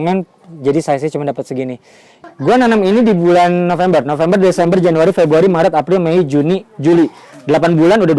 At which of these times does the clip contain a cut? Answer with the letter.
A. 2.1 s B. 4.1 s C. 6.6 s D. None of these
A